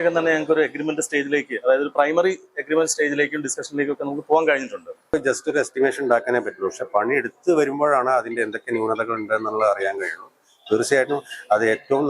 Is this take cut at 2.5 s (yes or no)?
no